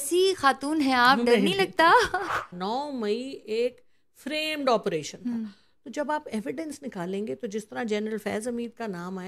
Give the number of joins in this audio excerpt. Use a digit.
1